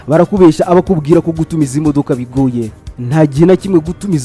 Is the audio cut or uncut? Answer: uncut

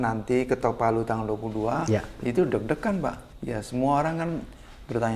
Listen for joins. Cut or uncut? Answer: cut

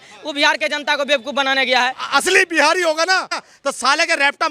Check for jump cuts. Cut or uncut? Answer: cut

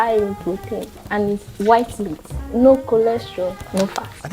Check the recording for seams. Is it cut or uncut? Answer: uncut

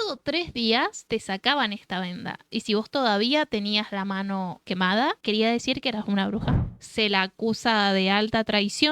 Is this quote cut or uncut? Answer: cut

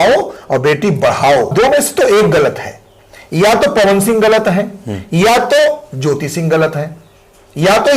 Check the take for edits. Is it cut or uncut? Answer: cut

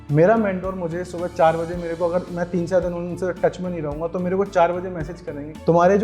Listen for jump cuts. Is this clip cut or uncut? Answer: uncut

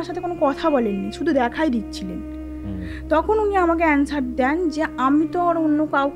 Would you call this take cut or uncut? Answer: uncut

